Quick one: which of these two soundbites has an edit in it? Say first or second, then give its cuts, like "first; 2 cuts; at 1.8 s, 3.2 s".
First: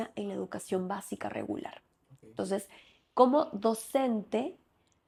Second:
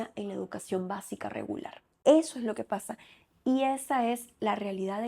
second; 1 cut; at 1.8 s